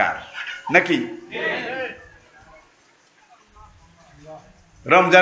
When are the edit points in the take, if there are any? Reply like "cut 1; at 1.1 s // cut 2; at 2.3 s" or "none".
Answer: none